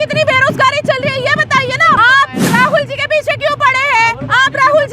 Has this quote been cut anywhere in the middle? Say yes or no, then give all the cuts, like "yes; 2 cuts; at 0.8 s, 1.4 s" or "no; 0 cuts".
yes; 1 cut; at 2.0 s